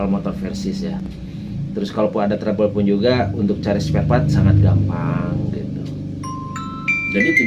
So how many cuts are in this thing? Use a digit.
0